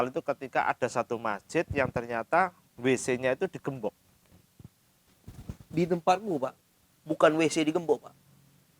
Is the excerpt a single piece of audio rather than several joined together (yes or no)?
yes